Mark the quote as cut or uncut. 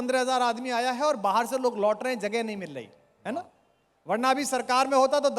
uncut